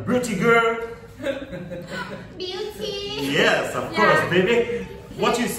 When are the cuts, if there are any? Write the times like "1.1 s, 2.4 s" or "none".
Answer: 4.7 s

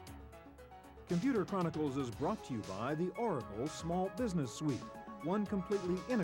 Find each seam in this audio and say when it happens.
1.1 s

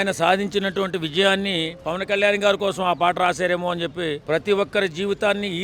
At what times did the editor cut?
4.2 s

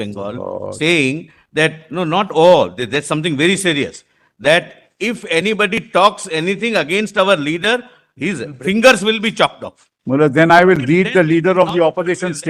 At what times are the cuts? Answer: none

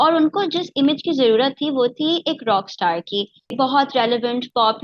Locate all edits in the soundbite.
3.5 s

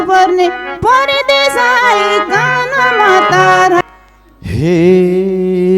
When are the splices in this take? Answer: 3.8 s

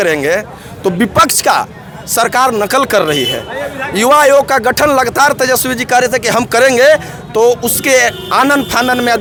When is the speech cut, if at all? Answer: none

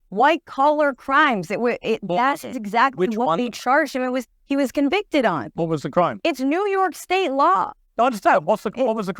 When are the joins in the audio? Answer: 3.5 s, 5.5 s, 7.3 s

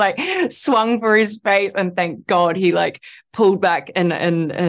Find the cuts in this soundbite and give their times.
none

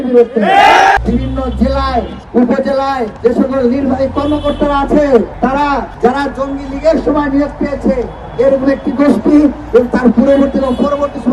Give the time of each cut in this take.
1.0 s, 2.2 s, 3.1 s, 5.6 s

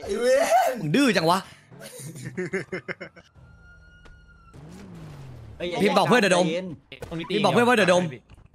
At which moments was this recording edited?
4.5 s

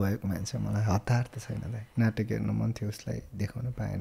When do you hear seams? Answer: 1.8 s

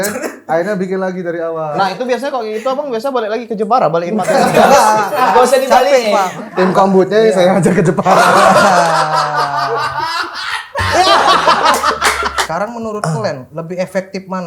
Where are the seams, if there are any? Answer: 1.8 s, 6.3 s, 12.4 s, 13.5 s

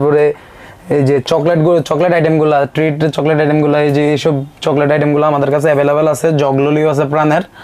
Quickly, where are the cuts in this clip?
none

